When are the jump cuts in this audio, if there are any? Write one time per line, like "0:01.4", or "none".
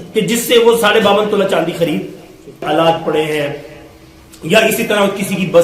0:02.6